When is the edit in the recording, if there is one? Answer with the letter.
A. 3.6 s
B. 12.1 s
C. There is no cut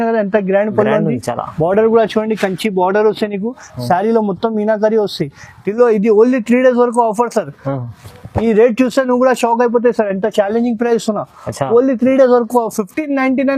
C